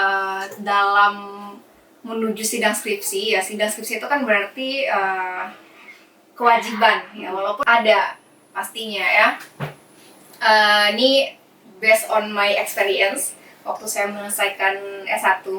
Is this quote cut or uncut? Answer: cut